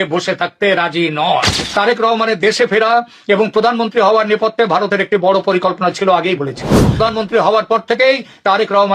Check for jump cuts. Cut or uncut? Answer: cut